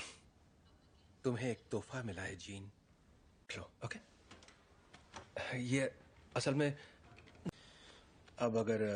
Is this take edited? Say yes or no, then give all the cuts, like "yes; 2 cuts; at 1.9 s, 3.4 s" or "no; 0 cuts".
no; 0 cuts